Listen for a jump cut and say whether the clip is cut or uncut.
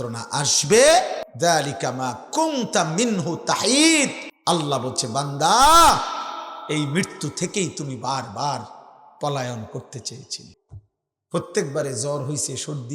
cut